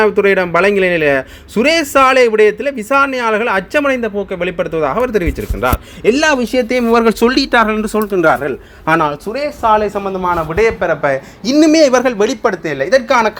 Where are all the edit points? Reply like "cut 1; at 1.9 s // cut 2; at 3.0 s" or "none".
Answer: none